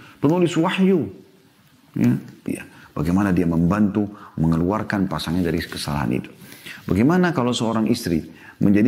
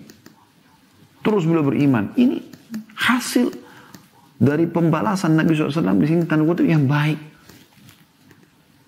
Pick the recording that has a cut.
first; 1 cut; at 2.4 s

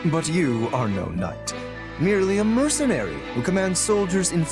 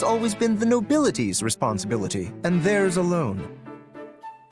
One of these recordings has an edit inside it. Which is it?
second; 1 cut; at 3.4 s

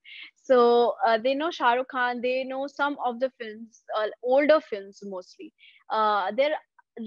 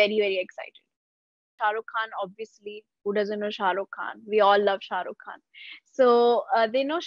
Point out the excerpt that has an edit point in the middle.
second; 1 cut; at 1.5 s

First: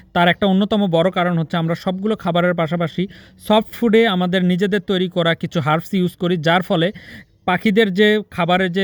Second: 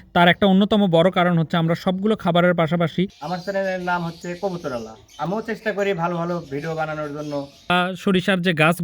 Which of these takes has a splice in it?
second; 2 cuts; at 3.2 s, 7.7 s

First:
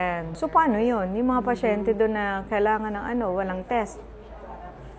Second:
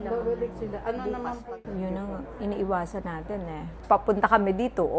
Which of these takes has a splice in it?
second; 2 cuts; at 1.4 s, 3.8 s

